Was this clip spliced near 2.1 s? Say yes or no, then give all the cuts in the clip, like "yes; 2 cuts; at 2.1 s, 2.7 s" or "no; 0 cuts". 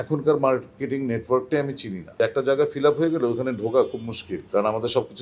yes; 1 cut; at 2.1 s